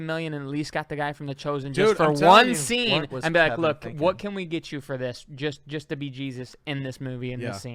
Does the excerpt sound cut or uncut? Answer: uncut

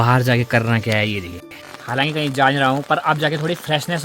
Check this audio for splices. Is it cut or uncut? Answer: cut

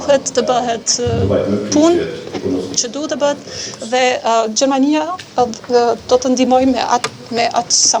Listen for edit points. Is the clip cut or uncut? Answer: uncut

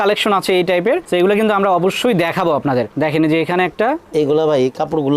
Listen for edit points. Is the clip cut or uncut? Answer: uncut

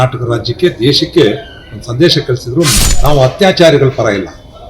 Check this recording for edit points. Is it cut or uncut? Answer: cut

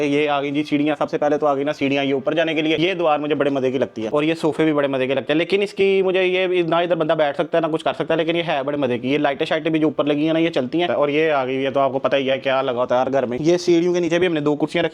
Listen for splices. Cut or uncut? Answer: uncut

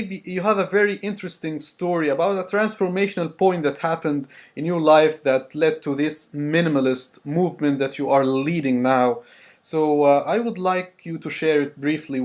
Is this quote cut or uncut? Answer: uncut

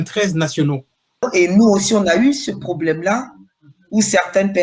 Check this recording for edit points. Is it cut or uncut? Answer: cut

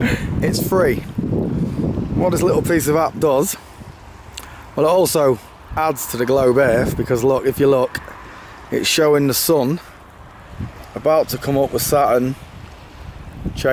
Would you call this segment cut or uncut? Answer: uncut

